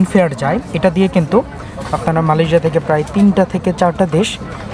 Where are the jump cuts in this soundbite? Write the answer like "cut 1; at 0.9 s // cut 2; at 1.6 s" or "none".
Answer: none